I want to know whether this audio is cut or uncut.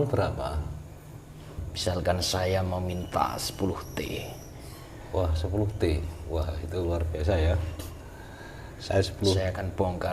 cut